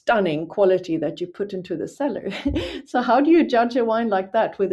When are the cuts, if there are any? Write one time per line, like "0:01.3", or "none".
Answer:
none